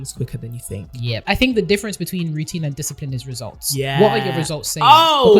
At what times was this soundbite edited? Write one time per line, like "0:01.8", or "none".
0:01.2